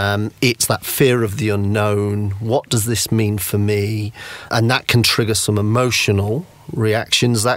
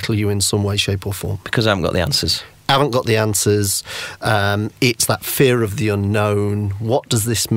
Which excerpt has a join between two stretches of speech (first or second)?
first